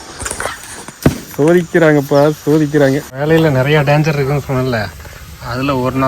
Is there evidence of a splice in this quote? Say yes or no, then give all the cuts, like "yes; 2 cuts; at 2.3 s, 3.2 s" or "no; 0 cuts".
yes; 1 cut; at 3.1 s